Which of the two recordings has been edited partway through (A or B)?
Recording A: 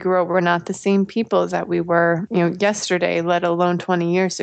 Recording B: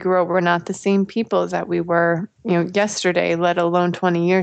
A